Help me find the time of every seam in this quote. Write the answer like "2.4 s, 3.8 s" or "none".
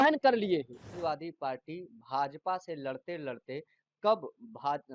0.9 s

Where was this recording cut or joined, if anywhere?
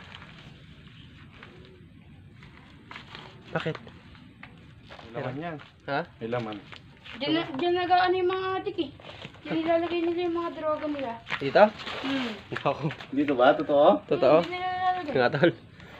5.2 s

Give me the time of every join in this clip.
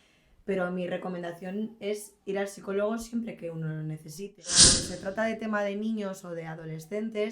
4.5 s

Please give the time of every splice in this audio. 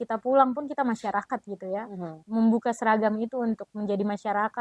2.2 s

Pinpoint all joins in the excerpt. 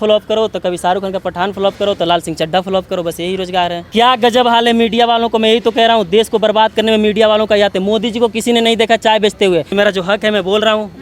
3.8 s, 9.7 s

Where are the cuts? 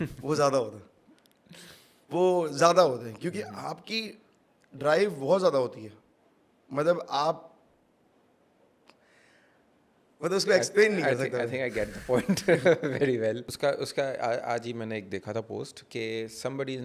13.5 s

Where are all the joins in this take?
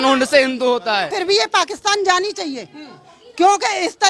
1.1 s

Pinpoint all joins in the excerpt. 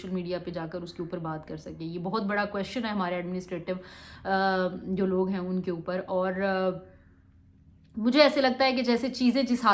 none

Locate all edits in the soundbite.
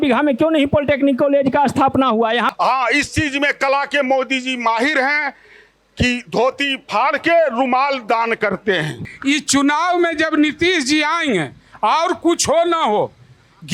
2.5 s, 9.1 s

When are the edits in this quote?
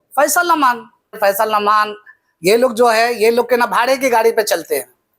1.2 s

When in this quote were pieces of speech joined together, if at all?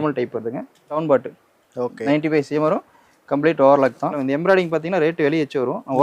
1.0 s, 4.2 s

